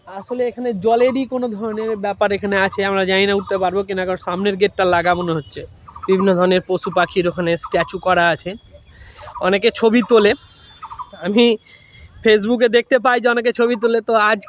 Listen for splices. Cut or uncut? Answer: cut